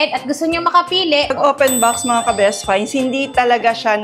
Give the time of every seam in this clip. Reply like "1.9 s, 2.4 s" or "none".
1.3 s

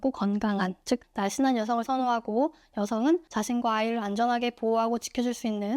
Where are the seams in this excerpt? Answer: 1.1 s, 3.3 s

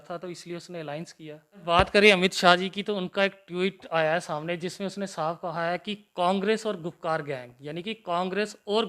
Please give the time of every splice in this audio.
1.6 s

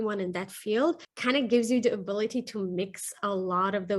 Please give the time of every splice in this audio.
1.1 s

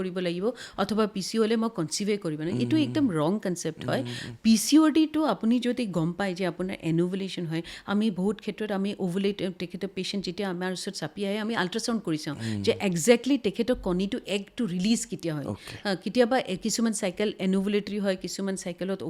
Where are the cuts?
none

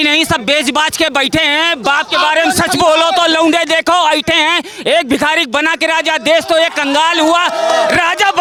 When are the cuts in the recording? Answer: none

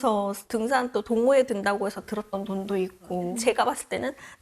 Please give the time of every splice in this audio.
3.4 s

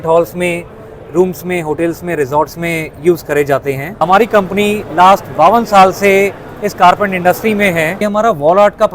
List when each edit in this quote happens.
3.9 s, 8.0 s

